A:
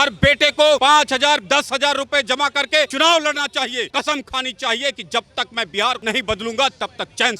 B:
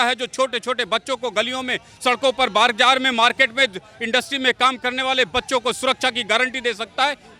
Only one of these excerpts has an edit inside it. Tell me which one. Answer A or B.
A